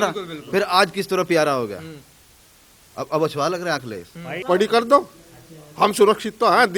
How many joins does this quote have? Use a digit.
1